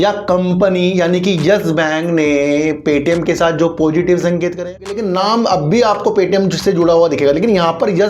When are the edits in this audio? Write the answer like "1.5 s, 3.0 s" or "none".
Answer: 4.9 s